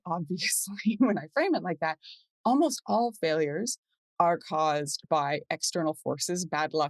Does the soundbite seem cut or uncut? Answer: uncut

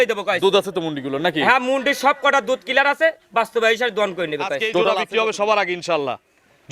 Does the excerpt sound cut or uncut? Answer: cut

